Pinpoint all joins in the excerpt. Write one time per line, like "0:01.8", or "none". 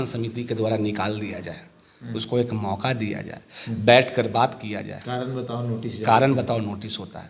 none